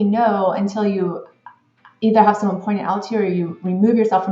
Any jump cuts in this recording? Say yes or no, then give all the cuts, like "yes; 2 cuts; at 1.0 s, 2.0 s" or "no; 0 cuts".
no; 0 cuts